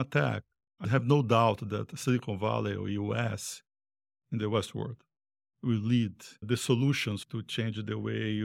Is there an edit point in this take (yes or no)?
no